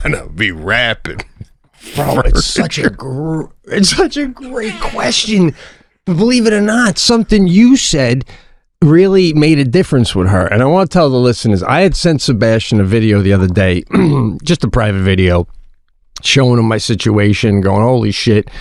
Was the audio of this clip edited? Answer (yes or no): no